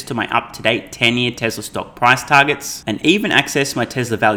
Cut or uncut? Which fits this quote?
uncut